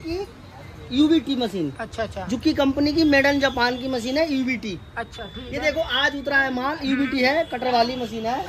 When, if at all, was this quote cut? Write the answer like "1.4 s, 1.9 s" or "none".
none